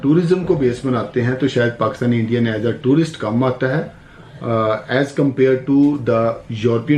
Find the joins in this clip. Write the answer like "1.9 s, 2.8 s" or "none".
none